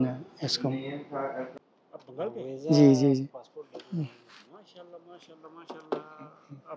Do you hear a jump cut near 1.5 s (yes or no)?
yes